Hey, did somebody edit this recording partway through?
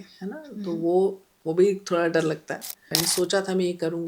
yes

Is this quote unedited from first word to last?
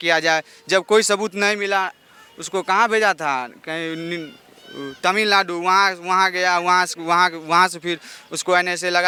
yes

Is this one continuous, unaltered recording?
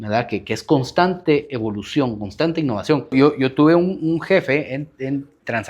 no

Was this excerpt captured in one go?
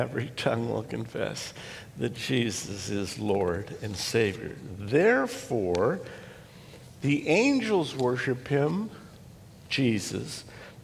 yes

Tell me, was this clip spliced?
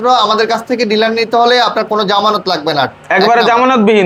no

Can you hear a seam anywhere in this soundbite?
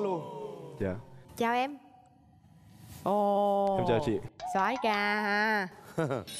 no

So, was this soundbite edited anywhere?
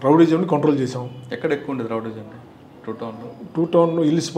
no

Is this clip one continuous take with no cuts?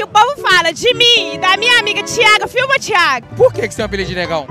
no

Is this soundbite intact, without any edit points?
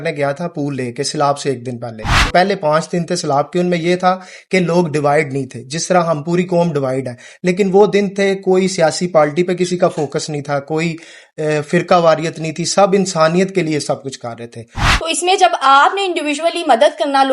no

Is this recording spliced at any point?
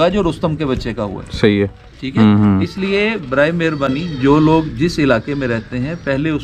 no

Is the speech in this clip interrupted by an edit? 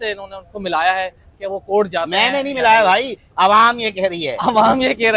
no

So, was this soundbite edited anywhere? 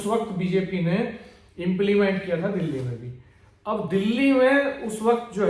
no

